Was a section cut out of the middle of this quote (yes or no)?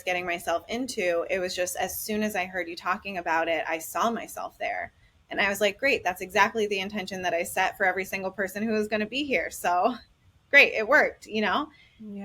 no